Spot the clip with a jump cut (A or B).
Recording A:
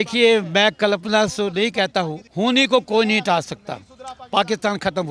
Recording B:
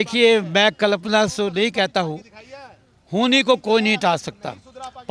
A